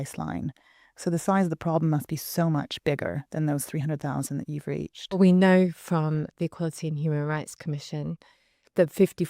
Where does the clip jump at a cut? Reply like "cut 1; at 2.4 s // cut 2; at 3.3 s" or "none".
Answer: cut 1; at 5.2 s